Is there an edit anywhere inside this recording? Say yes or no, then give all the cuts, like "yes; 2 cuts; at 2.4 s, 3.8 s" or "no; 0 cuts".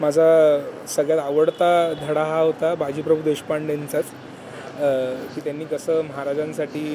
no; 0 cuts